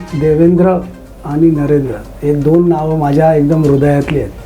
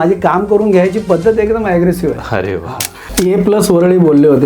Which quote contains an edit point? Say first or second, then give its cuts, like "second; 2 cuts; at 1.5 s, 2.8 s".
second; 1 cut; at 3.0 s